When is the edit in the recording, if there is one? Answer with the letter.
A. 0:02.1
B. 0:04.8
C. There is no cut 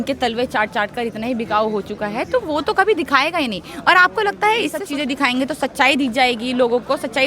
B